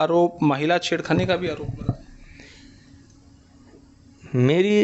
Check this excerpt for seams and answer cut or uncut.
uncut